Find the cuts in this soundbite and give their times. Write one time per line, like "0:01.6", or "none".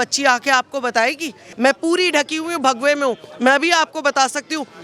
0:01.4